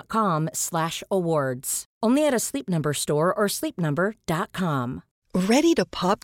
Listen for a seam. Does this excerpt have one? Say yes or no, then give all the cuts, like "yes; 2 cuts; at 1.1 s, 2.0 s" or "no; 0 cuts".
yes; 1 cut; at 5.1 s